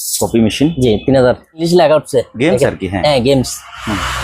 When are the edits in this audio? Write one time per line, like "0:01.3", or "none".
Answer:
0:01.7